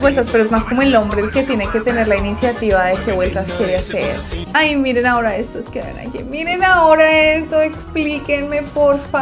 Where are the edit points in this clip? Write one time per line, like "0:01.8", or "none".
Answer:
0:04.5